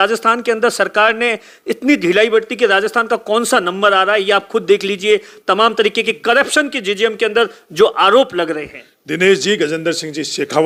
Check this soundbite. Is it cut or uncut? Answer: uncut